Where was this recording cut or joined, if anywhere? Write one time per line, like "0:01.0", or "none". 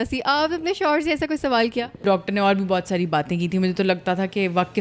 0:02.0